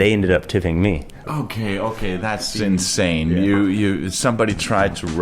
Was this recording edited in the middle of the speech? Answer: yes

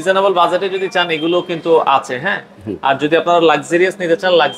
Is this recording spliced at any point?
no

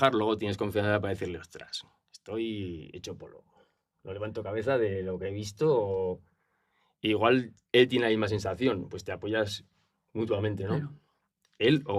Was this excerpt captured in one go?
yes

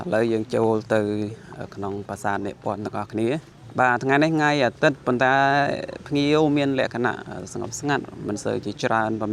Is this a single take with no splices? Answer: yes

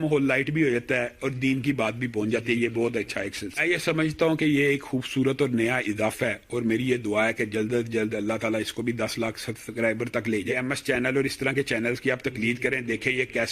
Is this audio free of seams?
no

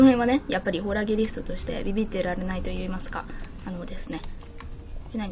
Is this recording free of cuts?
yes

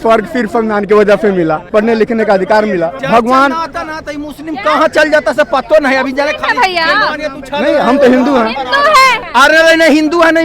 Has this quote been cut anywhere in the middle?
yes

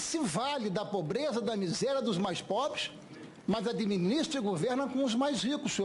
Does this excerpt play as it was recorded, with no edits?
no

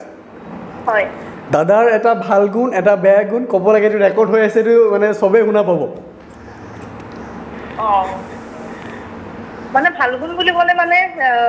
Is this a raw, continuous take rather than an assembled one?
yes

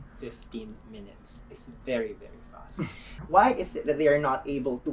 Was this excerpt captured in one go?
no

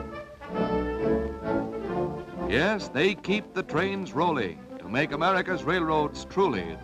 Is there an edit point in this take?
yes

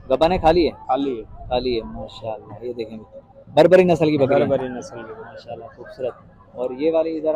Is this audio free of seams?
yes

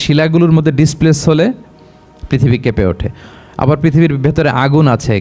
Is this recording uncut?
yes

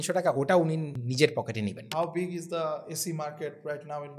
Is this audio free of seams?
no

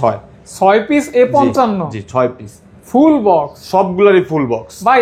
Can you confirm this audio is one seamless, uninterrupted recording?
yes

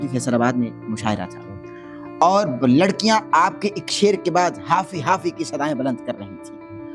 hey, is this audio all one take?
yes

